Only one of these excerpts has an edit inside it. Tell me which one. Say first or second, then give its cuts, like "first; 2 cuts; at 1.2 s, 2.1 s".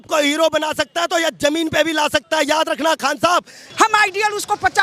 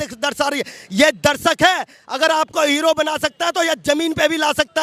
first; 1 cut; at 3.6 s